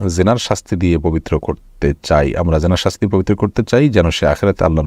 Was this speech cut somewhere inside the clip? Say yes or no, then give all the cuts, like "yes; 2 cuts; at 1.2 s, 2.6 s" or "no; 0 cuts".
no; 0 cuts